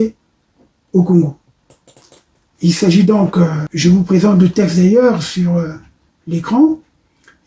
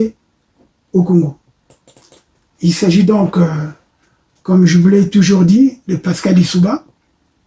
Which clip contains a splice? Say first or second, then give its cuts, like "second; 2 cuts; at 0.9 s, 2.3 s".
first; 1 cut; at 3.6 s